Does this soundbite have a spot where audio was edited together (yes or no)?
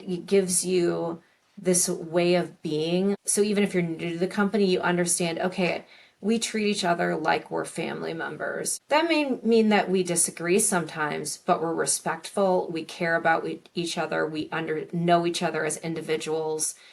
yes